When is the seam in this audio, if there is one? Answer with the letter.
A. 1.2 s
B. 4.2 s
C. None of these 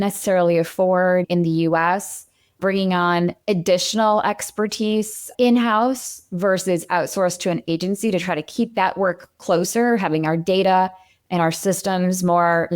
A